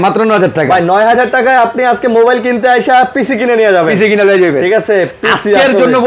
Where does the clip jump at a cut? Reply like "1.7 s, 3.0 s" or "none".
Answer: none